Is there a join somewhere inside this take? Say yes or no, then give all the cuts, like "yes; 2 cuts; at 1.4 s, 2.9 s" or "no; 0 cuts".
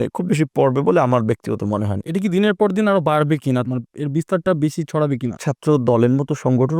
yes; 3 cuts; at 1.9 s, 3.6 s, 5.5 s